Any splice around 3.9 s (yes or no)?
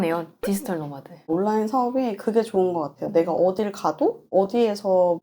no